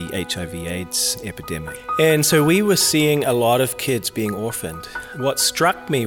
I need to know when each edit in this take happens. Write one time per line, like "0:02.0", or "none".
0:01.8
0:05.0